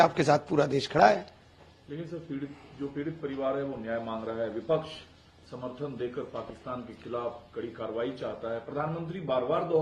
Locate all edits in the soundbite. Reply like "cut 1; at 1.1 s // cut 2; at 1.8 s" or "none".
none